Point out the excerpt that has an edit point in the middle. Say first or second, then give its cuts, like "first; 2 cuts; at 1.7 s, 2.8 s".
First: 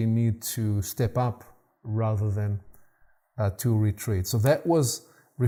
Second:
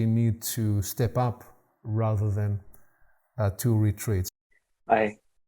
second; 1 cut; at 4.2 s